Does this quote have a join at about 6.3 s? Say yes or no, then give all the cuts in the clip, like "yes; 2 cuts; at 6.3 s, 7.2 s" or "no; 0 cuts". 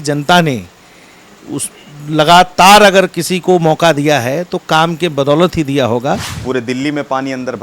yes; 1 cut; at 6.3 s